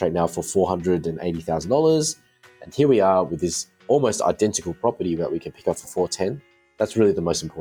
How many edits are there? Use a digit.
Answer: 0